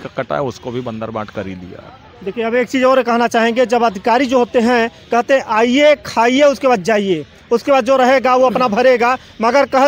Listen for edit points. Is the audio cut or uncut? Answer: uncut